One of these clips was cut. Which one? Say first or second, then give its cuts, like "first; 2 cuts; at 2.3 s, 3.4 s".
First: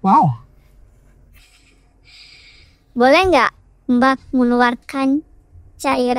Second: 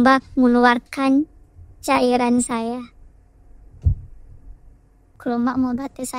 second; 1 cut; at 5.1 s